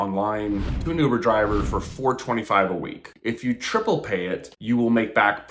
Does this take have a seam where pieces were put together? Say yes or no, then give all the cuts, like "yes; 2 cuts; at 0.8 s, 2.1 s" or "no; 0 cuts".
yes; 1 cut; at 3.0 s